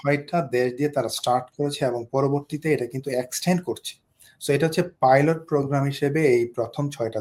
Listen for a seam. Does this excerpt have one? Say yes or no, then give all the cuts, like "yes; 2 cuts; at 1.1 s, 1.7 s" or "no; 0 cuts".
no; 0 cuts